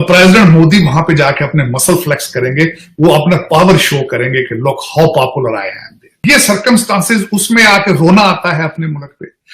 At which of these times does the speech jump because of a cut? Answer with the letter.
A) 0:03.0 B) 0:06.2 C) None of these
B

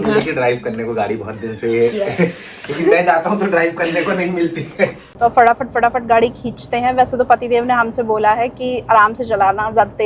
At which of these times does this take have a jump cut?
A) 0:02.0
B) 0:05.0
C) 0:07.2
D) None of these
B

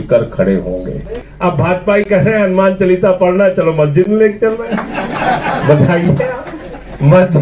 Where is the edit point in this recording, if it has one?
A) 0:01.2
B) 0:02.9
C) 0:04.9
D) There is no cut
A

